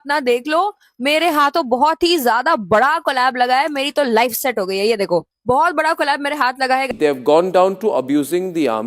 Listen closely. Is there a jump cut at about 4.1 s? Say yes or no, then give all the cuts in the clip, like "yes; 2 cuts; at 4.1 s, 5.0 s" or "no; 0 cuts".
no; 1 cut; at 6.9 s